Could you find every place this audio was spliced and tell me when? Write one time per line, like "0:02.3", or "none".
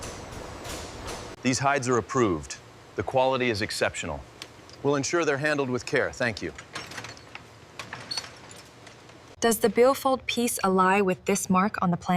0:01.3
0:09.2